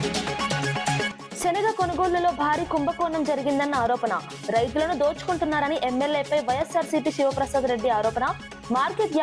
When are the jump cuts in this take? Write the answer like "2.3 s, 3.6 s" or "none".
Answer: 1.2 s

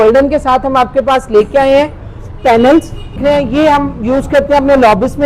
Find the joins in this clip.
3.2 s

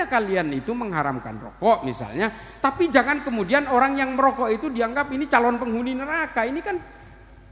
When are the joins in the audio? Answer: none

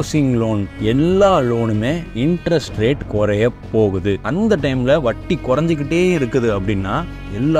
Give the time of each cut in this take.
4.2 s

